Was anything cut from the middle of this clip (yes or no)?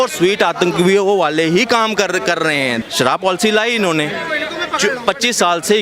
yes